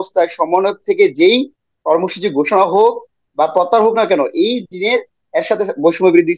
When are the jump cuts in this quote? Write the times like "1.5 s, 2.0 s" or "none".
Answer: none